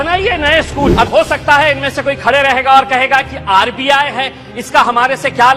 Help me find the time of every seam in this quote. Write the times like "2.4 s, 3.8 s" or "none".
0.9 s